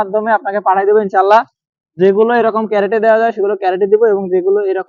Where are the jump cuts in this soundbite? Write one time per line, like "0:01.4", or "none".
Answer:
none